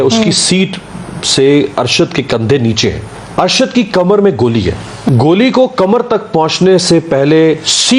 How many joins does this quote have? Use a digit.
2